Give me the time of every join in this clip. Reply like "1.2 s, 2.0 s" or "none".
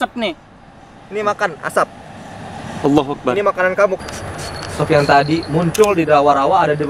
4.0 s